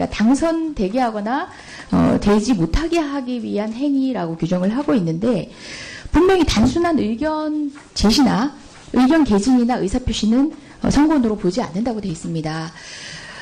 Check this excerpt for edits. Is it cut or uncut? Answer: cut